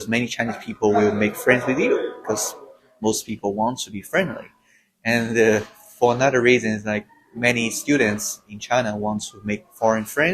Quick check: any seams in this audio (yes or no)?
no